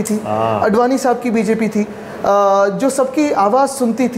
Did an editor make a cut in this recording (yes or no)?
no